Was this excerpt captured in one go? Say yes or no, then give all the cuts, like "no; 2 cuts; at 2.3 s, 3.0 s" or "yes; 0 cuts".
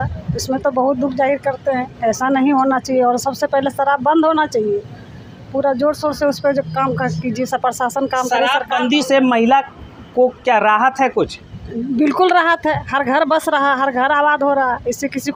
yes; 0 cuts